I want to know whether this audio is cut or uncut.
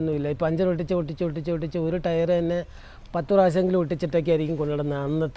uncut